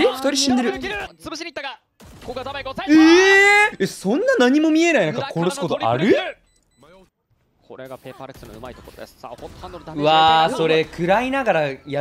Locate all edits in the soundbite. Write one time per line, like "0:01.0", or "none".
0:01.1
0:03.8
0:06.9